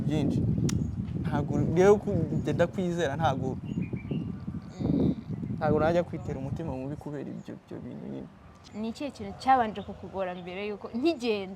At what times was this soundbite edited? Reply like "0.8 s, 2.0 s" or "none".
8.6 s